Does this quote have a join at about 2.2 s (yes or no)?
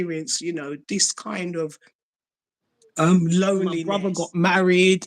no